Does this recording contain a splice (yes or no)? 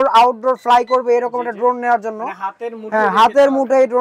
no